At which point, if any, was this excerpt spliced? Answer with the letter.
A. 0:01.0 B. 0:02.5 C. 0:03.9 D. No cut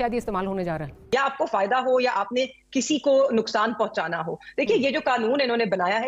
A